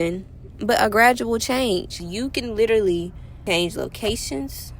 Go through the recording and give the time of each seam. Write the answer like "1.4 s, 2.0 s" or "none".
2.0 s, 3.2 s